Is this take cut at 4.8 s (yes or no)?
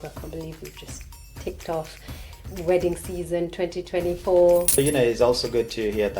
yes